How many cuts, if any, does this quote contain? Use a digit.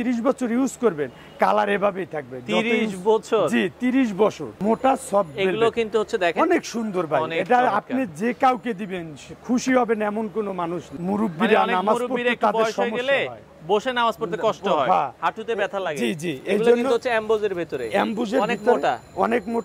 2